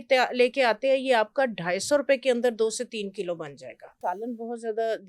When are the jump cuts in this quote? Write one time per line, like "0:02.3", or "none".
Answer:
0:04.0